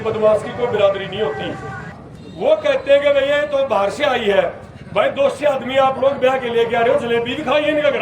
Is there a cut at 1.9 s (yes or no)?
yes